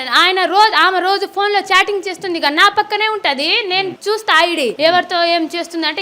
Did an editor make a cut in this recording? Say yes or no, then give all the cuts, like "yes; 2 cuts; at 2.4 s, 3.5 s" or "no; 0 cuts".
yes; 2 cuts; at 4.0 s, 4.8 s